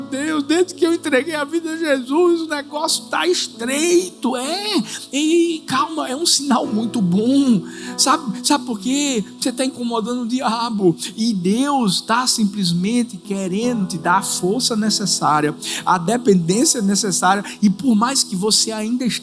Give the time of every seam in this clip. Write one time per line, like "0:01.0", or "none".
none